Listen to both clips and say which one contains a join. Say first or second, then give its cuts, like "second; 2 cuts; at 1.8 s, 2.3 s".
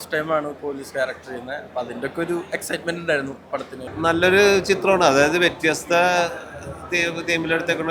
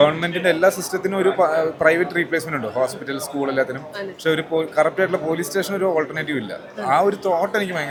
first; 1 cut; at 3.9 s